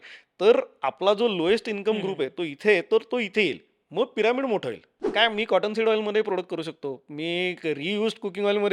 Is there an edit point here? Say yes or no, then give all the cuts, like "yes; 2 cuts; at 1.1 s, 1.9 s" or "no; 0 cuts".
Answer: yes; 1 cut; at 5.1 s